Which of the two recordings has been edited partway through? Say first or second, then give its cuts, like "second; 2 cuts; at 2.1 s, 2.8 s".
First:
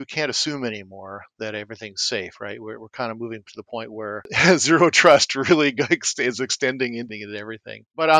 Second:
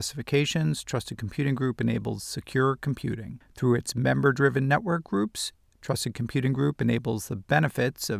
first; 2 cuts; at 4.3 s, 7.1 s